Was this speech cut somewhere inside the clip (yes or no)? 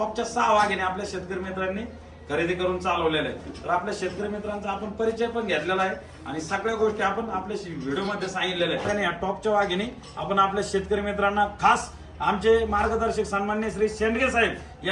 yes